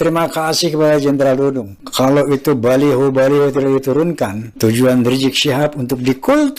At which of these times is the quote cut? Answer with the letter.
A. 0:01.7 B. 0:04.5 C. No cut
B